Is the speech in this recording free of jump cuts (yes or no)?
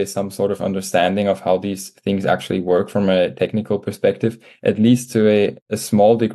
yes